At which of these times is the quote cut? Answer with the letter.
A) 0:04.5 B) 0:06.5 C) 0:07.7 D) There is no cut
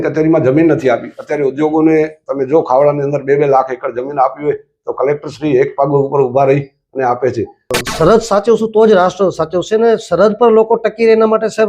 C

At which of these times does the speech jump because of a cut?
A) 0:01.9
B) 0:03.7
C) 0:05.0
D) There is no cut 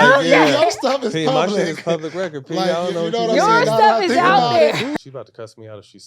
C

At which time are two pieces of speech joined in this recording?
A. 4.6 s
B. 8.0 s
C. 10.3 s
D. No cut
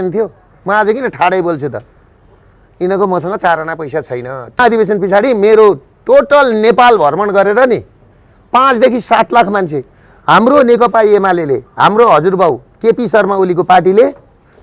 A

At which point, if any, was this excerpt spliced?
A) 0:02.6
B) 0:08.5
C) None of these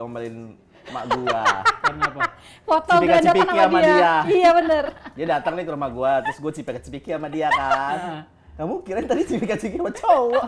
C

